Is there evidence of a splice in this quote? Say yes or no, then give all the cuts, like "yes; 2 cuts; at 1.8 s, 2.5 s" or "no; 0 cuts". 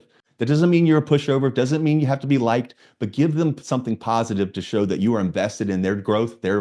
no; 0 cuts